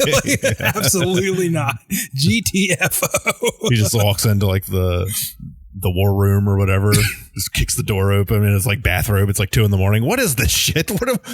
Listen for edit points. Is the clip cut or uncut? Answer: uncut